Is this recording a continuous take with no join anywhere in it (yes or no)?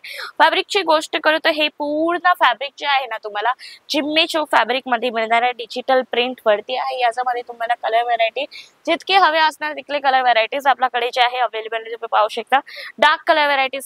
yes